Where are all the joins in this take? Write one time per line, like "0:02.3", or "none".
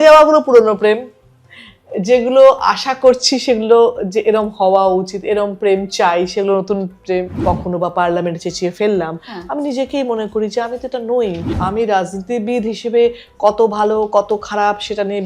0:07.4
0:11.6